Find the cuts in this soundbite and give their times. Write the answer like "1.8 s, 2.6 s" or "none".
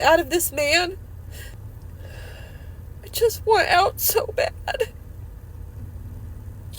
1.5 s